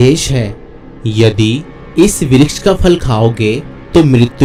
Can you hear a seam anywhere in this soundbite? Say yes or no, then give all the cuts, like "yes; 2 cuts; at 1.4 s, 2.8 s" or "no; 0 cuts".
no; 0 cuts